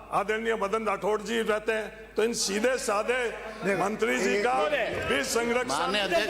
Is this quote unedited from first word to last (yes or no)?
yes